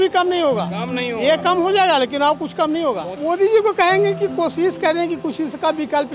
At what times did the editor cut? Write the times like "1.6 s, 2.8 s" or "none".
3.1 s